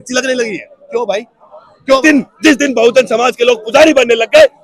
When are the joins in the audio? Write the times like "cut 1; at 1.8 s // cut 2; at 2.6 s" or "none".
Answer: cut 1; at 2.0 s